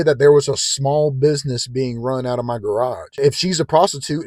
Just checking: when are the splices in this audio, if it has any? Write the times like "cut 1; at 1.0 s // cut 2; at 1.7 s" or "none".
none